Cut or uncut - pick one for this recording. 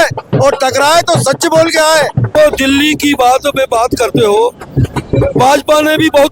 cut